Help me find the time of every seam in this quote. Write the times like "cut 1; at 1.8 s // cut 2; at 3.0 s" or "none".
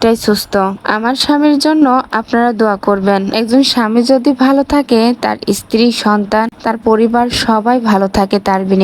cut 1; at 3.3 s

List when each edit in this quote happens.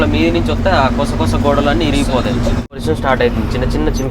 cut 1; at 2.8 s

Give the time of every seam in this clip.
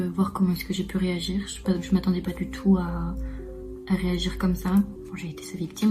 cut 1; at 5.0 s

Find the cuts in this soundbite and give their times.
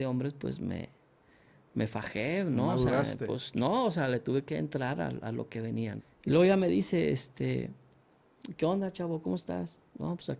cut 1; at 6.0 s

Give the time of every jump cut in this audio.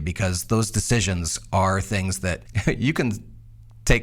cut 1; at 2.5 s

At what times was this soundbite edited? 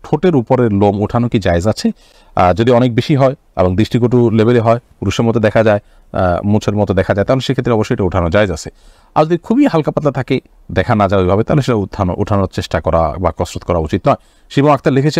none

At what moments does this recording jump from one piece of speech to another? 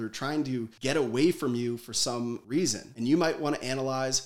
cut 1; at 2.7 s

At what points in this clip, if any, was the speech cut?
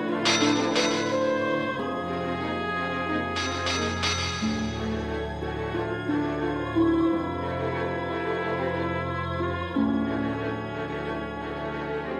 none

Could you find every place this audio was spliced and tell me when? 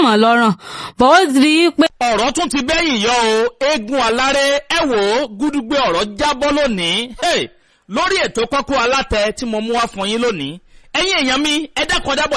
cut 1; at 1.9 s

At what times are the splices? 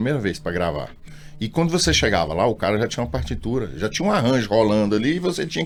none

